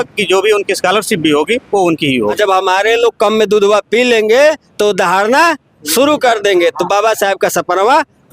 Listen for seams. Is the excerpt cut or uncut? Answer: cut